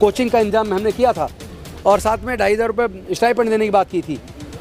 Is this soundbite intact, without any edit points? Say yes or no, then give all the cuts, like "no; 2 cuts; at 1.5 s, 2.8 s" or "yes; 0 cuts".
yes; 0 cuts